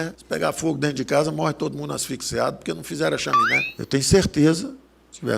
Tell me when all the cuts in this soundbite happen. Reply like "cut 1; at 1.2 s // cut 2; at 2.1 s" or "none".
cut 1; at 3.7 s